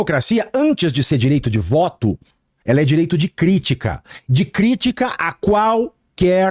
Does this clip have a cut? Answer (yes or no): no